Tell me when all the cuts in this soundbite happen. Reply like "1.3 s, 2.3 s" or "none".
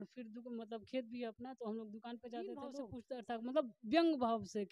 2.9 s